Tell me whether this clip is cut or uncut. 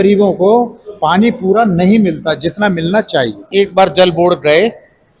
cut